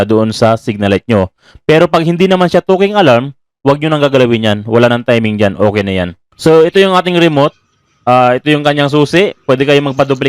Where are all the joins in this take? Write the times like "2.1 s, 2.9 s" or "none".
6.2 s